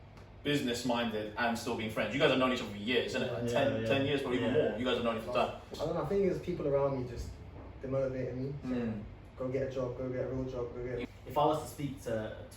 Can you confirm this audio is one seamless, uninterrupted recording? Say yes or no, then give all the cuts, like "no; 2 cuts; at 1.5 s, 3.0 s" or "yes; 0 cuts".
no; 2 cuts; at 5.7 s, 11.0 s